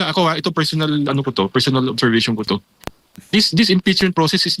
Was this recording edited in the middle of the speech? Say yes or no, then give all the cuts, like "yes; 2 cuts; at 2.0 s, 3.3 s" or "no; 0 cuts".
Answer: no; 0 cuts